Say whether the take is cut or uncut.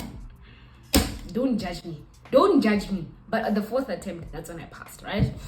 uncut